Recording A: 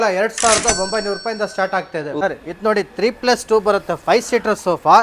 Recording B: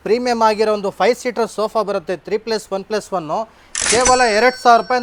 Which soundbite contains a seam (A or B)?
A